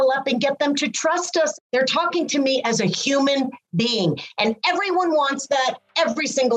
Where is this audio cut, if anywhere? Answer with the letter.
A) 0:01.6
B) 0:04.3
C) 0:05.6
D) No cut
A